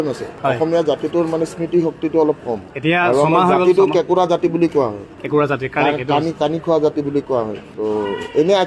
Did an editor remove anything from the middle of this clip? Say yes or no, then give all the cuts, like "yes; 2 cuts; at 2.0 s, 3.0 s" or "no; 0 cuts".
yes; 2 cuts; at 2.7 s, 7.6 s